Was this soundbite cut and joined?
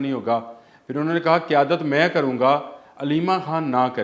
no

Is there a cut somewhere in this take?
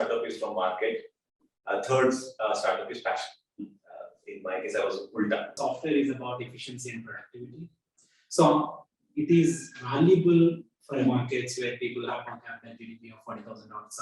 yes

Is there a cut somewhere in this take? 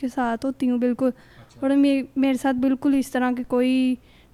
no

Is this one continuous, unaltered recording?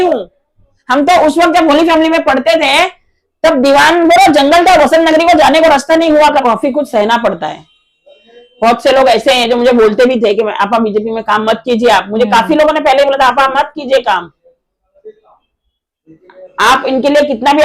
no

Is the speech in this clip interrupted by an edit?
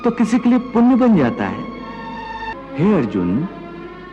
yes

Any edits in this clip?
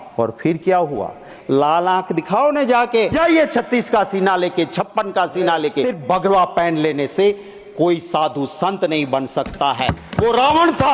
yes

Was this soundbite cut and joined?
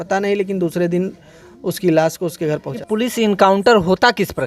yes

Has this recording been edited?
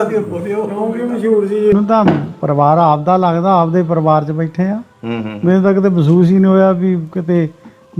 yes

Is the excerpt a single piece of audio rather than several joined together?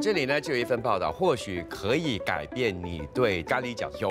yes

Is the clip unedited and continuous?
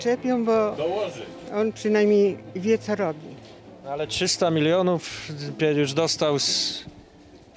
yes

